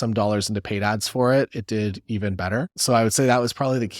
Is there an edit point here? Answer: yes; 1 cut; at 2.7 s

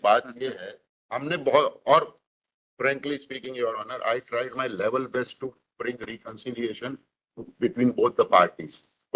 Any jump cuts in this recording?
no; 0 cuts

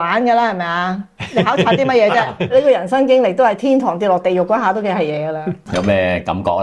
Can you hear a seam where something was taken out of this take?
yes; 2 cuts; at 2.5 s, 5.6 s

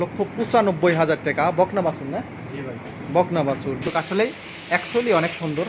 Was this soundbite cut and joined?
yes; 1 cut; at 3.8 s

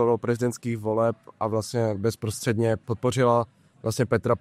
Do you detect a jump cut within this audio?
yes; 1 cut; at 2.8 s

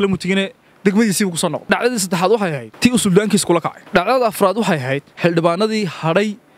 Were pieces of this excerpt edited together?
yes; 4 cuts; at 1.6 s, 2.7 s, 3.8 s, 5.1 s

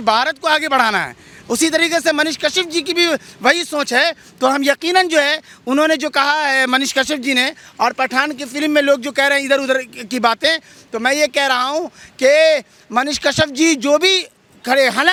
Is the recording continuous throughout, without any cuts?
yes; 0 cuts

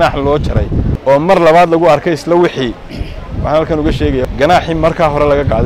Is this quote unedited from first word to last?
no; 2 cuts; at 0.9 s, 4.2 s

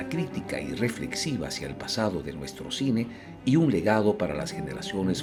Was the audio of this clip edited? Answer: no; 0 cuts

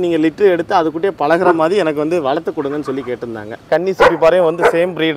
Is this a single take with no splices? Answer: no; 1 cut; at 3.6 s

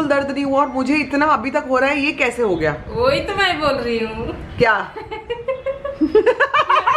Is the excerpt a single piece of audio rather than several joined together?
yes; 0 cuts

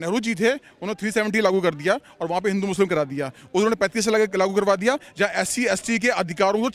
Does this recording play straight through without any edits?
yes; 0 cuts

